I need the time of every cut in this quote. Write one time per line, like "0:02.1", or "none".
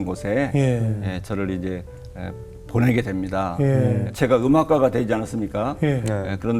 0:04.1